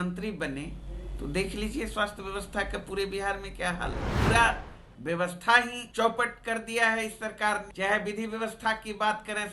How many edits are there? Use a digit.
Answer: 3